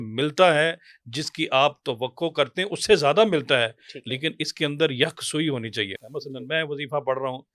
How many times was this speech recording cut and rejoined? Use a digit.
1